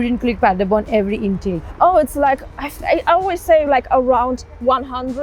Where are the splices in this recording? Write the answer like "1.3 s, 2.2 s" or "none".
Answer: none